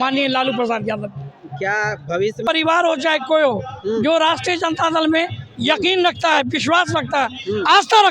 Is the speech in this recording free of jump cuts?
no; 1 cut; at 2.4 s

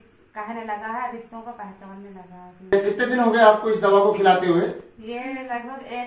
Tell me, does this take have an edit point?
yes; 1 cut; at 2.7 s

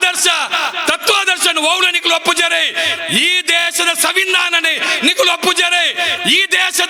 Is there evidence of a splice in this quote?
no; 0 cuts

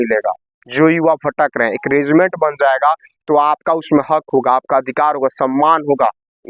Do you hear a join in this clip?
no; 0 cuts

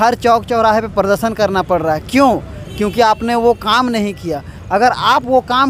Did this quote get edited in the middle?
no; 0 cuts

